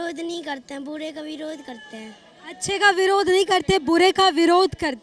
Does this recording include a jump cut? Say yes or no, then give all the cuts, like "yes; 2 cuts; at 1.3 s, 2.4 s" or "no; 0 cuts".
no; 0 cuts